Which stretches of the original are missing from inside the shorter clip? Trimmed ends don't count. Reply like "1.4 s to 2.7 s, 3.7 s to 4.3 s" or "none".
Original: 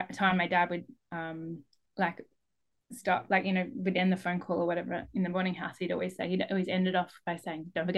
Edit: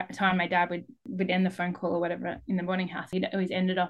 1.1 s to 3.7 s, 5.7 s to 6.2 s

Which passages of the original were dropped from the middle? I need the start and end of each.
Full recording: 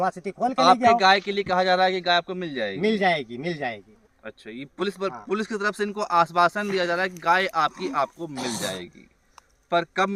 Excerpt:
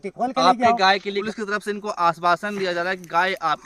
1.4 s to 5.3 s

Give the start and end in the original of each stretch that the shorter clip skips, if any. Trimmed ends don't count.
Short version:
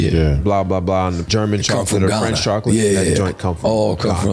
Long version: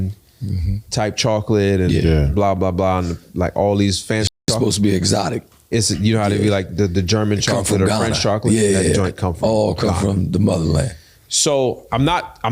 3.2 s to 7.1 s

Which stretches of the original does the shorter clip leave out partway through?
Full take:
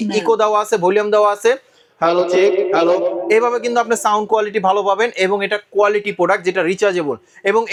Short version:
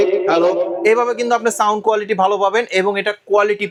none

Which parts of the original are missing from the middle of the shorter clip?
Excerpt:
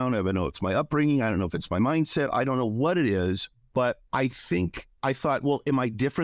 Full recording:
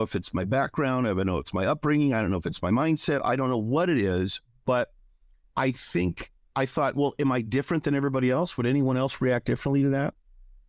5.5 s to 6.1 s

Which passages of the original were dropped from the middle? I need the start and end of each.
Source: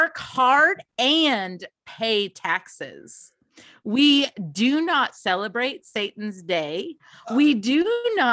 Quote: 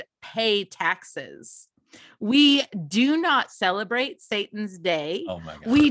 none

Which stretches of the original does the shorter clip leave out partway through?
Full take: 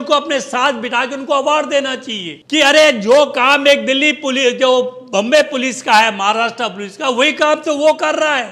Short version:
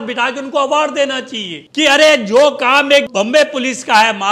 3.8 s to 5.1 s

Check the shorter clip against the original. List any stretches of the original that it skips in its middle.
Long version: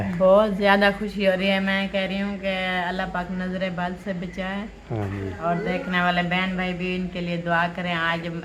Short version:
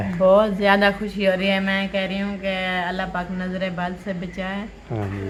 none

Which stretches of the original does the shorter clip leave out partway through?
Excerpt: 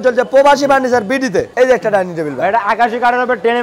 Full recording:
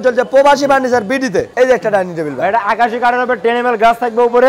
none

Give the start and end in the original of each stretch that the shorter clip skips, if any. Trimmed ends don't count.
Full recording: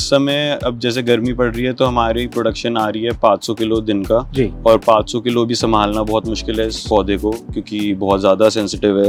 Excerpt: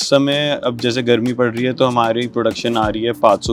none

